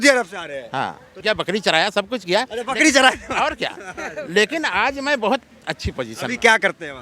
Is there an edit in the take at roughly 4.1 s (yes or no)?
no